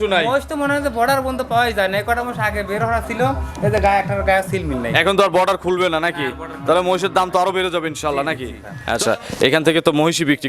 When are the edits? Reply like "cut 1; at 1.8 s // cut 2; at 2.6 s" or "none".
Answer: cut 1; at 8.7 s